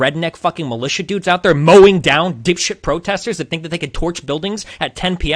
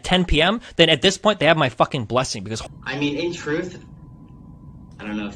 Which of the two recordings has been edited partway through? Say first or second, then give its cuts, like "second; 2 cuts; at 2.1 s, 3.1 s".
second; 1 cut; at 2.4 s